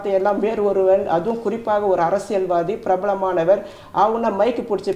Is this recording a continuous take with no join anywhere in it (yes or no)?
yes